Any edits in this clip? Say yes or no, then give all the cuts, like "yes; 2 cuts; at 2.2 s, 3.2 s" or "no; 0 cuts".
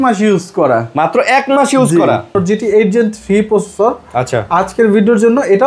yes; 1 cut; at 2.3 s